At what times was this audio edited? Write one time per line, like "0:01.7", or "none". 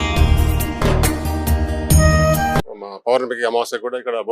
0:02.6